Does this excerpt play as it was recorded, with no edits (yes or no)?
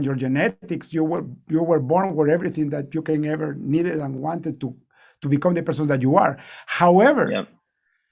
yes